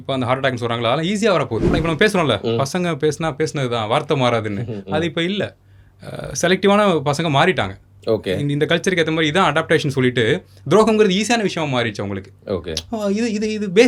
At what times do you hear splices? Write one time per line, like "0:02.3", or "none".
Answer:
0:01.8